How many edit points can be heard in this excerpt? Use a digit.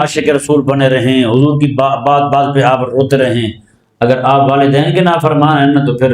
0